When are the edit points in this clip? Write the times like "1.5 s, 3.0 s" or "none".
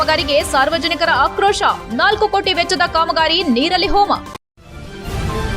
4.5 s